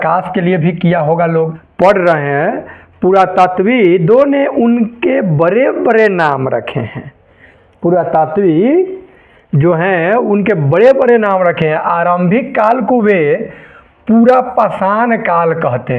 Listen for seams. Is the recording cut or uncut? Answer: cut